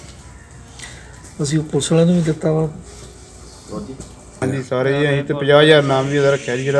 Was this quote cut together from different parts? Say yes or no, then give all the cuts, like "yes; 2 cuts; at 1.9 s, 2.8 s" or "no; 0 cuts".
yes; 1 cut; at 4.4 s